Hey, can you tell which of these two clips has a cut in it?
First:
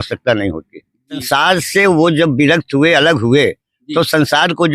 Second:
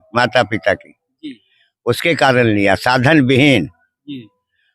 first; 1 cut; at 1.3 s

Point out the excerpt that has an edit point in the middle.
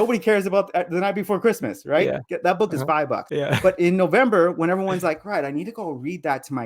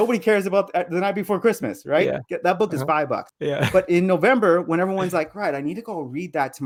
first; 1 cut; at 3.3 s

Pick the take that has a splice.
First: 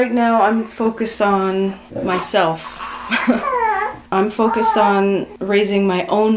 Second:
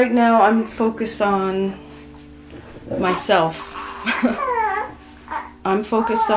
first; 3 cuts; at 1.8 s, 4.0 s, 5.3 s

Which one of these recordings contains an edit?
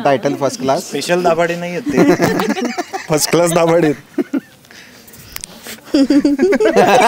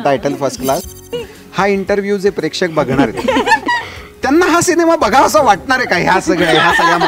second; 1 cut; at 1.1 s

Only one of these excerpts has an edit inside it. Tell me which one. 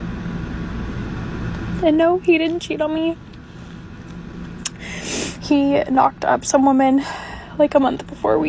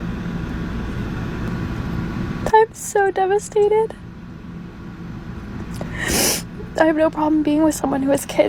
second; 1 cut; at 1.5 s

